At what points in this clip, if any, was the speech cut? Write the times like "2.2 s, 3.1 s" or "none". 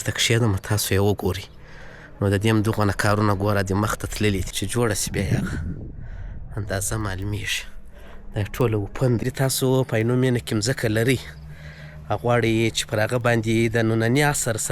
4.6 s, 9.2 s

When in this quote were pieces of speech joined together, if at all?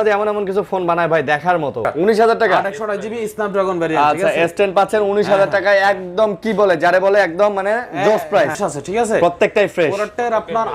1.9 s, 8.6 s

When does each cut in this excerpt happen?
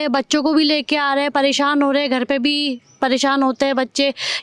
none

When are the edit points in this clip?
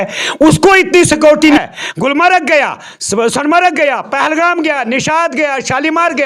1.6 s

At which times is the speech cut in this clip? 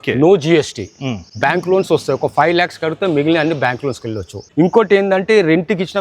4.4 s

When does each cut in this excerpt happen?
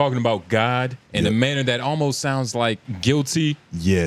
1.0 s, 2.9 s

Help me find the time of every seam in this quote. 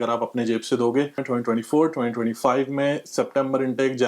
1.2 s

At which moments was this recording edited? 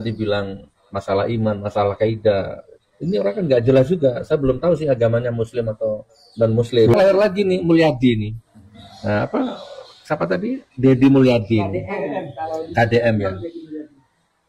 6.9 s

